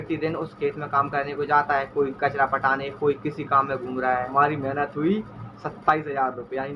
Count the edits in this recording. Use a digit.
1